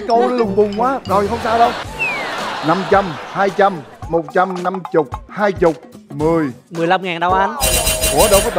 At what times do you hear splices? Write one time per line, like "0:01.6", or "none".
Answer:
0:01.9

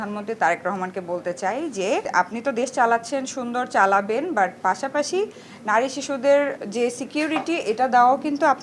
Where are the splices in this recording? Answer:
none

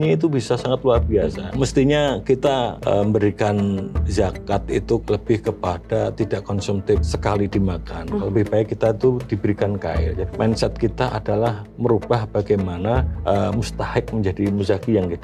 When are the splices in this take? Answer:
0:01.4
0:02.8
0:04.0
0:05.0
0:07.1
0:10.2
0:13.1

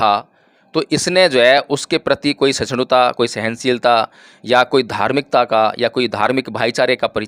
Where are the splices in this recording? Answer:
none

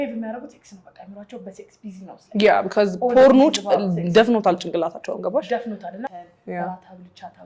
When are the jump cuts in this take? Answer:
0:06.1

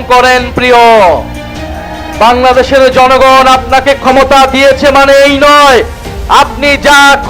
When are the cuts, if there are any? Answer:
none

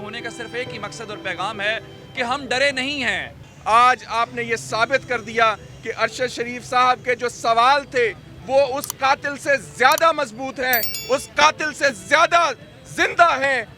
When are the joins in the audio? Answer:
0:03.5

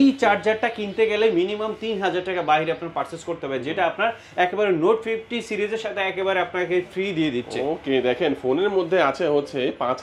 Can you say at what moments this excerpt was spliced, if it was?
none

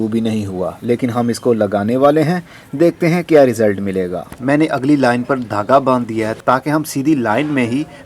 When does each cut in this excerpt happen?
0:04.2

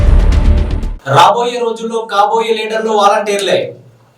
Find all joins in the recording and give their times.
0:00.9

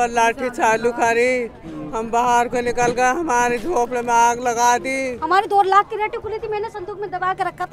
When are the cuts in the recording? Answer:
0:05.1

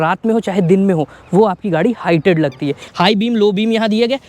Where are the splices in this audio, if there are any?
0:02.8

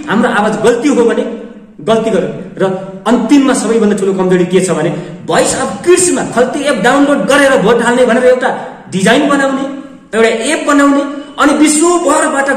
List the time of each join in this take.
none

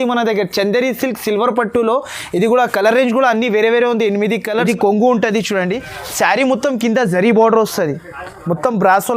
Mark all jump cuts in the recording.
0:04.5

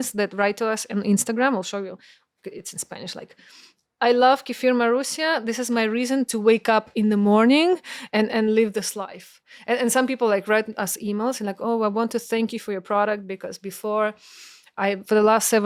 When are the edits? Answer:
none

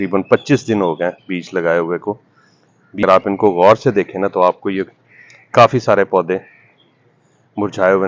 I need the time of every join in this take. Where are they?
0:03.0

